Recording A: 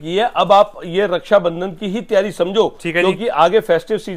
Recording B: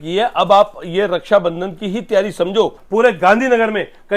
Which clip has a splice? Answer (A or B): B